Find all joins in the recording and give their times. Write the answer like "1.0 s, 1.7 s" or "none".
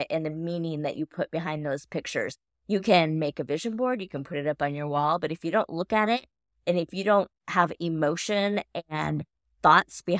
none